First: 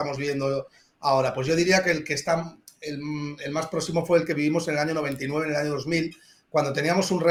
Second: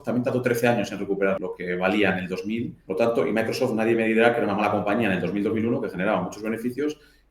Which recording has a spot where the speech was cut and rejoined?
second; 2 cuts; at 1.4 s, 2.8 s

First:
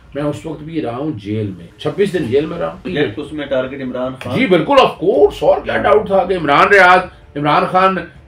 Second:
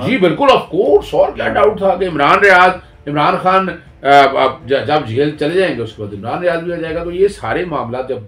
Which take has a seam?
first; 2 cuts; at 1.7 s, 2.9 s

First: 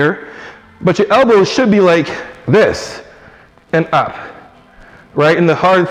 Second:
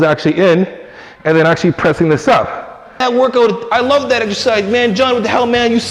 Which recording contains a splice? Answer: second; 1 cut; at 3.0 s

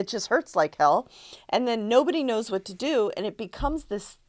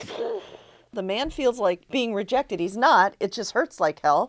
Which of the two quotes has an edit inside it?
second; 2 cuts; at 1.0 s, 1.8 s

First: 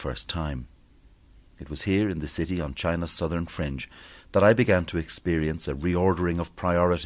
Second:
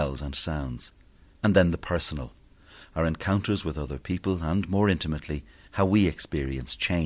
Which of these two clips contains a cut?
second; 1 cut; at 5.3 s

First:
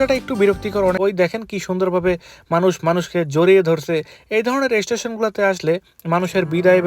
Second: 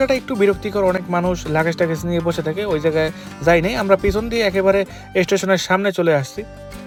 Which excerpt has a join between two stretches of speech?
first; 1 cut; at 1.0 s

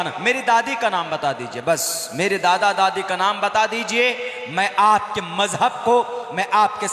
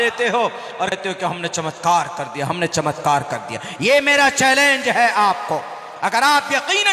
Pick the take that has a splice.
second; 1 cut; at 0.9 s

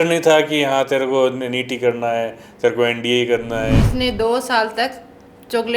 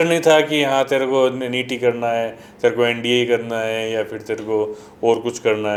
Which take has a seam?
first; 1 cut; at 3.8 s

